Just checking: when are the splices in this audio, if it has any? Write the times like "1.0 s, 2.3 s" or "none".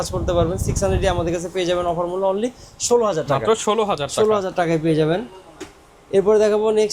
none